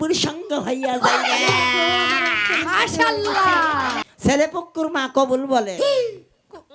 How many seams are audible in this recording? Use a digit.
1